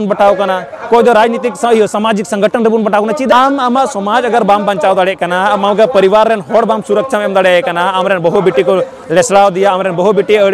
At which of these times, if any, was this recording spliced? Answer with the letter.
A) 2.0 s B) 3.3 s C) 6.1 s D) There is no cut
B